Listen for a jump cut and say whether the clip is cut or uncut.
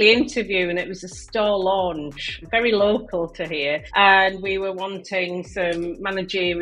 uncut